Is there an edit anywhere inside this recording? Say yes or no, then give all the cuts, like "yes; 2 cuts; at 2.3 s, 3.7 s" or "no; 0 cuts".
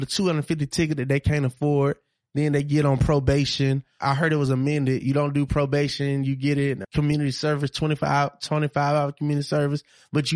yes; 2 cuts; at 4.1 s, 6.8 s